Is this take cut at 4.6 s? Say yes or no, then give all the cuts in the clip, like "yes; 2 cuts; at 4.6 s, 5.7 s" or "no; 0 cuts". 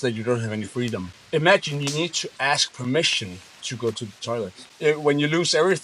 yes; 2 cuts; at 1.1 s, 4.6 s